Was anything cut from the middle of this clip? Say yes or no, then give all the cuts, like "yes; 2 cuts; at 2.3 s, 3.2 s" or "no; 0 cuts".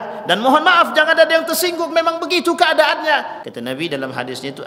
yes; 1 cut; at 3.4 s